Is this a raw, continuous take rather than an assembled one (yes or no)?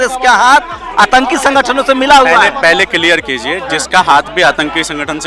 no